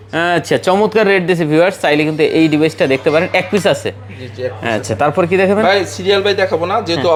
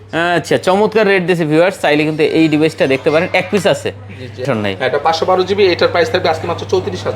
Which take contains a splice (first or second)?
second